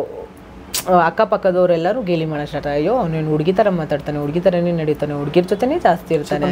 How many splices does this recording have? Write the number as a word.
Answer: zero